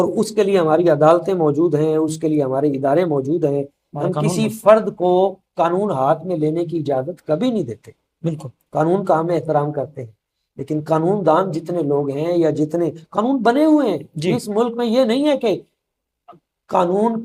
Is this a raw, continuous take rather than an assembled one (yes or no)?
yes